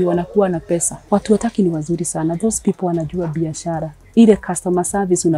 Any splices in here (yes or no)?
yes